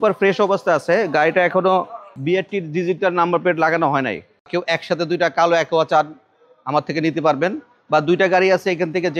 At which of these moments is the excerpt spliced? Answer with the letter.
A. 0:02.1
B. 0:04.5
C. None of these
B